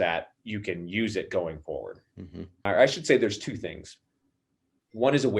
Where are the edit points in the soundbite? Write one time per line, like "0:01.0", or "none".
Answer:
0:02.5